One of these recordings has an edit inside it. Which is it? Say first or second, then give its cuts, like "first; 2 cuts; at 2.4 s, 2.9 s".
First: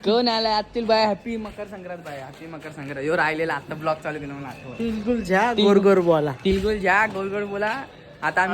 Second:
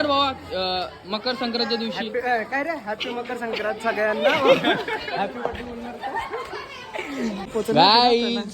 second; 1 cut; at 7.5 s